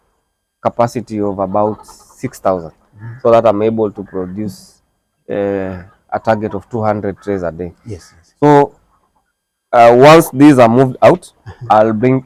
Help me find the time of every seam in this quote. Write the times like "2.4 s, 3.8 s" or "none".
none